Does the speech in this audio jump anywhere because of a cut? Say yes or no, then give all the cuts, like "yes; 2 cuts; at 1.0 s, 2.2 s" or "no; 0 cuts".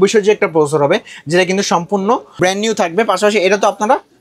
no; 0 cuts